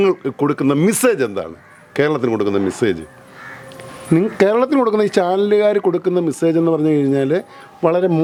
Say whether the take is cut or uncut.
uncut